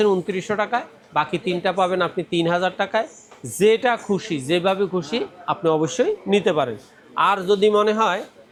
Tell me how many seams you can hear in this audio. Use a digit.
0